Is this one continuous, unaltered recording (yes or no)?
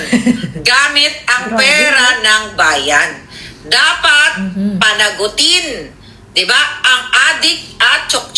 no